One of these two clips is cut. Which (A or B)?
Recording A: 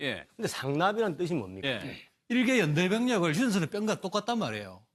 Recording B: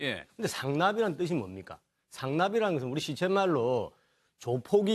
B